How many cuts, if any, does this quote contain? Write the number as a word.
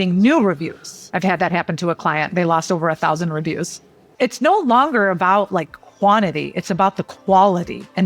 two